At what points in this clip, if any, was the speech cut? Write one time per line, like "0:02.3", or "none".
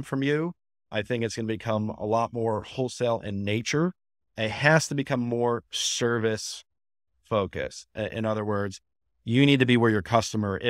0:04.3